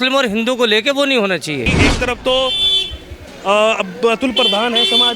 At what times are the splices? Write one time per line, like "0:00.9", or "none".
0:01.8